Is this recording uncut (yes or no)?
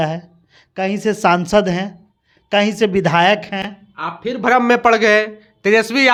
yes